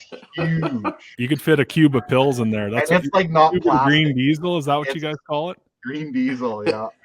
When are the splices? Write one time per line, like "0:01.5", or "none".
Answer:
0:01.1

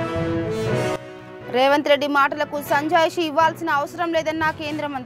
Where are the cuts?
0:01.0

